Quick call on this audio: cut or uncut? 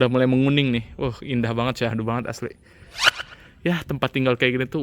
cut